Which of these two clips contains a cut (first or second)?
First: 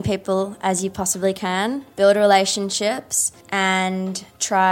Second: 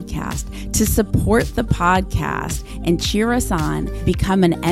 first